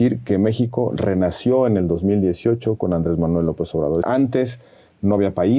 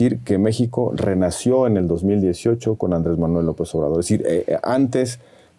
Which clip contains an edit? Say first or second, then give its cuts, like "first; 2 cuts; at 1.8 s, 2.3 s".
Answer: first; 1 cut; at 4.0 s